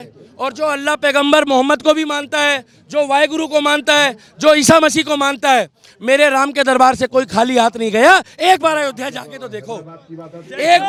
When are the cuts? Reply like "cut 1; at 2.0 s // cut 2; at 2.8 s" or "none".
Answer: none

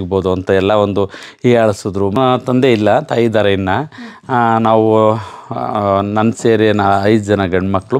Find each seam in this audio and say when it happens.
cut 1; at 2.2 s

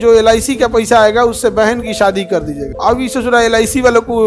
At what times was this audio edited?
cut 1; at 2.6 s

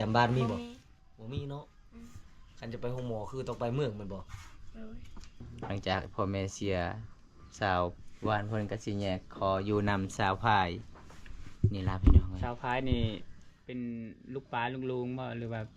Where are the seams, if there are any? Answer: cut 1; at 5.5 s

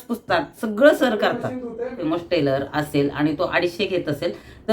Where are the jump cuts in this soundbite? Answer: cut 1; at 2.0 s

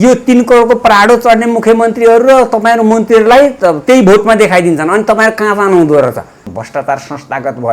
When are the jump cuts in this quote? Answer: cut 1; at 6.4 s

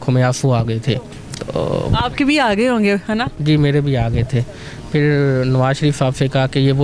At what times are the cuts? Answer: none

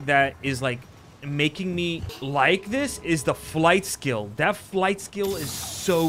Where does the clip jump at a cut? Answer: cut 1; at 2.1 s

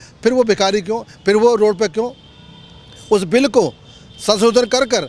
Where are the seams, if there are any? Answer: none

